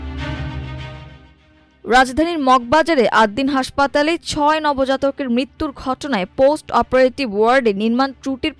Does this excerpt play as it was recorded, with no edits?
no; 1 cut; at 1.2 s

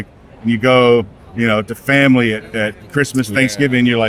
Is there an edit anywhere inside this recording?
no; 0 cuts

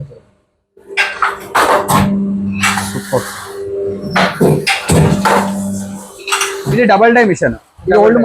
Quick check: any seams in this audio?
yes; 1 cut; at 6.6 s

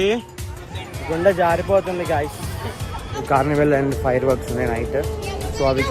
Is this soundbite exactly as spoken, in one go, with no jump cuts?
no; 1 cut; at 3.1 s

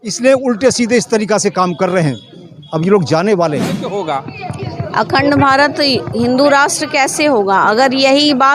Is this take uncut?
no; 1 cut; at 4.0 s

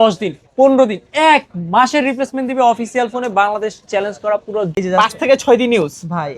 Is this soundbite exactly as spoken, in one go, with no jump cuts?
no; 1 cut; at 4.7 s

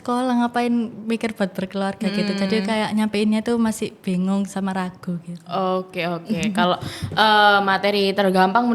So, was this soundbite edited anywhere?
no; 0 cuts

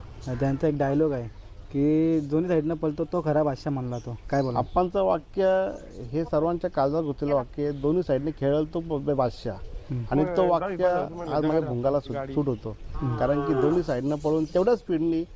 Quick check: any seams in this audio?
no; 0 cuts

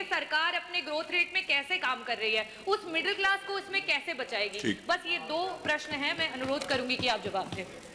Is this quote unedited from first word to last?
yes; 0 cuts

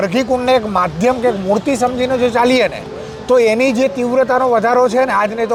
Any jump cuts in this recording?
no; 0 cuts

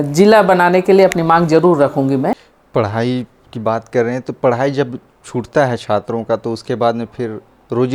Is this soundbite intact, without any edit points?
no; 1 cut; at 2.5 s

